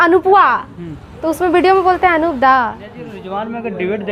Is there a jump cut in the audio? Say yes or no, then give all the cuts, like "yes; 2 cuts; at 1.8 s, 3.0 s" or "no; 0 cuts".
yes; 1 cut; at 3.1 s